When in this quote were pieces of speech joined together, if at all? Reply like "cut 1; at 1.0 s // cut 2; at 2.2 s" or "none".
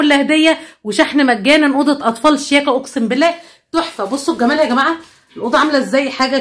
none